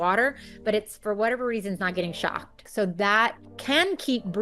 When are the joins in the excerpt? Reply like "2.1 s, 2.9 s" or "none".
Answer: 2.6 s, 3.5 s

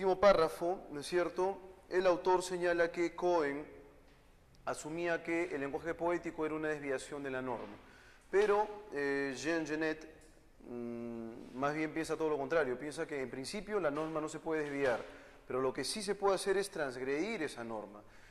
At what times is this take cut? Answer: 3.5 s

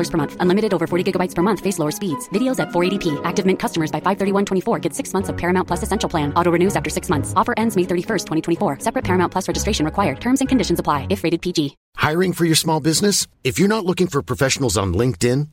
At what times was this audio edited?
11.8 s

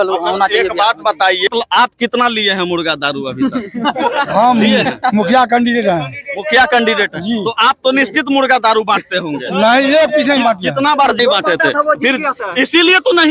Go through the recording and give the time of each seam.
1.5 s, 11.2 s

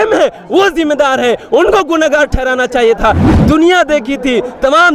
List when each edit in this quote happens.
3.3 s

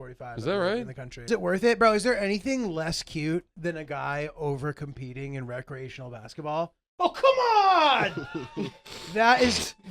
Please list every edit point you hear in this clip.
1.3 s

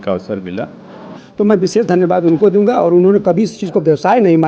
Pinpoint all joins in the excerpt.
1.1 s

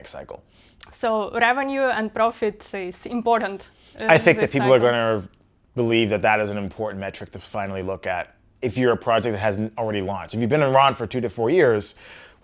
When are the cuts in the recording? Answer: none

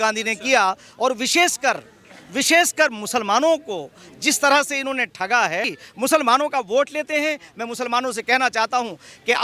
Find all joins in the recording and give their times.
5.8 s

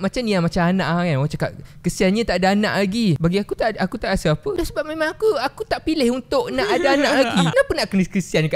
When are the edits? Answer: 3.2 s, 4.5 s, 7.5 s

